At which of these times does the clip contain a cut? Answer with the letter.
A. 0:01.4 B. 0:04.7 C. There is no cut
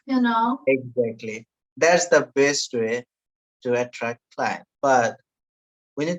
B